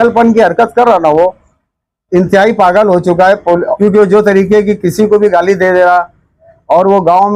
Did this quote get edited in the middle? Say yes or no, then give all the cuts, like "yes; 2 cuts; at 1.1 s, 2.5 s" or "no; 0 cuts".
yes; 1 cut; at 3.7 s